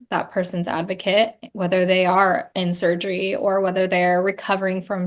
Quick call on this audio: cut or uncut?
uncut